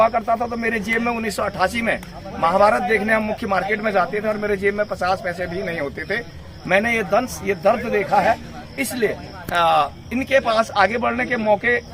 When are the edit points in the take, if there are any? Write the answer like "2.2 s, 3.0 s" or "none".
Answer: none